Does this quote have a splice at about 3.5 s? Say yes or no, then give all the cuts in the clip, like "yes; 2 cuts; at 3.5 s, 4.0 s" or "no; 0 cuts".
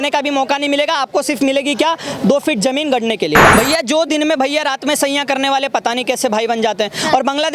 yes; 1 cut; at 3.5 s